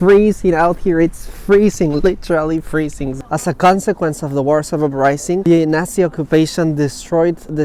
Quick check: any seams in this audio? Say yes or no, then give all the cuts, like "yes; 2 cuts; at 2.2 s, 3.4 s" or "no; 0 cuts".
yes; 2 cuts; at 3.1 s, 5.4 s